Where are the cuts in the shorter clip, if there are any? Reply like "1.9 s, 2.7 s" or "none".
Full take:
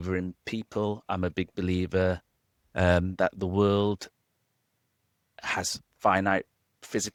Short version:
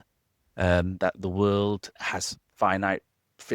1.9 s